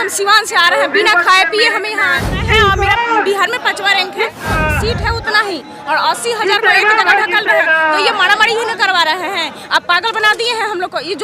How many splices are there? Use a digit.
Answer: 2